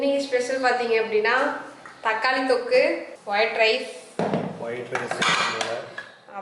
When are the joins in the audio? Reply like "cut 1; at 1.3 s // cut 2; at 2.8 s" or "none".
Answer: cut 1; at 3.1 s